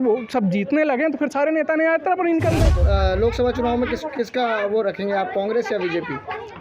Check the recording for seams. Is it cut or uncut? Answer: cut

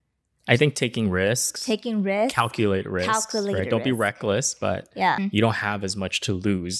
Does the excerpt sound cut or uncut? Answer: cut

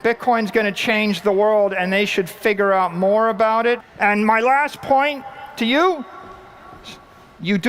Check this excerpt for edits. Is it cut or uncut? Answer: cut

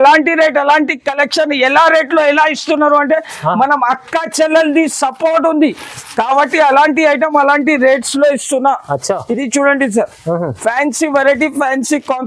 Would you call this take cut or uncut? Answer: uncut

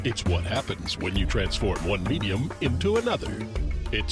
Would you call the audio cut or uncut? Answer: uncut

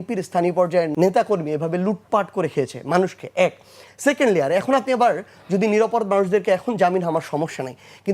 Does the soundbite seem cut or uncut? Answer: cut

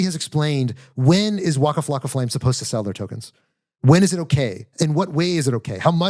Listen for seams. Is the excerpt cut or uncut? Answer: uncut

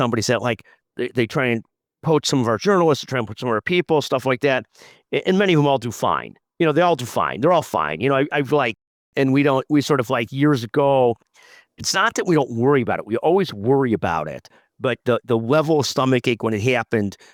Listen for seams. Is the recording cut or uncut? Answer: uncut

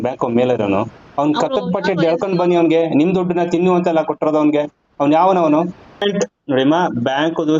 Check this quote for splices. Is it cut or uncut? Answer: cut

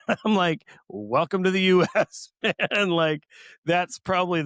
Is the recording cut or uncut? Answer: uncut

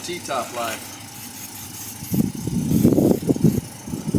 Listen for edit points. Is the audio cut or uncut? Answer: uncut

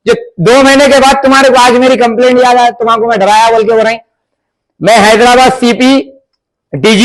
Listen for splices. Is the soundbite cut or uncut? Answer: uncut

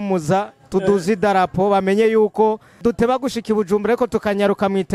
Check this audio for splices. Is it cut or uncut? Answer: cut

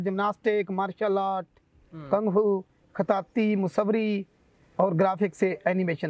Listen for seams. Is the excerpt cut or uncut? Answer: uncut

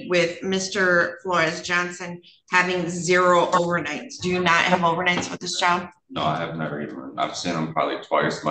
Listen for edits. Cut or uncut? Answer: uncut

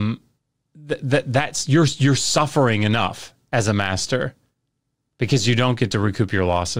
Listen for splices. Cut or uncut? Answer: uncut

